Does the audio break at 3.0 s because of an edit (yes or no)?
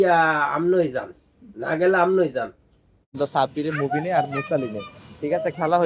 yes